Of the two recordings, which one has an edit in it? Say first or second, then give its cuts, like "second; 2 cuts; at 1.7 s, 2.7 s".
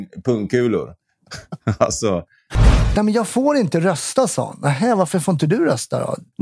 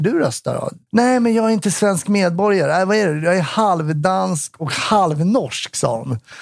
first; 1 cut; at 2.7 s